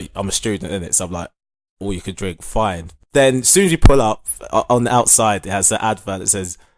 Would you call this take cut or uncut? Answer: cut